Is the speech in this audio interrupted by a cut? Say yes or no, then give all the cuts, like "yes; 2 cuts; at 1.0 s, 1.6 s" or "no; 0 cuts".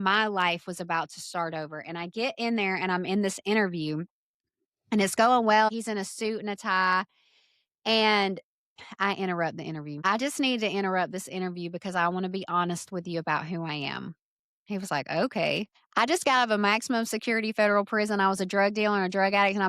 yes; 3 cuts; at 5.7 s, 10.0 s, 15.8 s